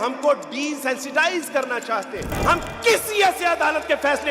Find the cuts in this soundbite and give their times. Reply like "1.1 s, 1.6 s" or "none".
2.3 s